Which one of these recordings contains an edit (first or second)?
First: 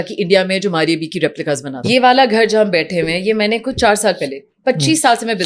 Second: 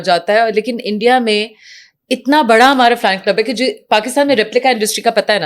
first